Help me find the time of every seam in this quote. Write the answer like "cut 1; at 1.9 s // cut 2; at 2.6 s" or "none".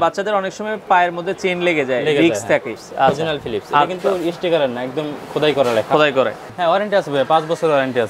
cut 1; at 2.8 s // cut 2; at 6.5 s